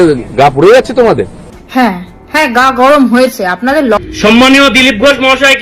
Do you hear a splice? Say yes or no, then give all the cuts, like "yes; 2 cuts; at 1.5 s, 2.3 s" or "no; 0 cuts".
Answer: yes; 1 cut; at 4.0 s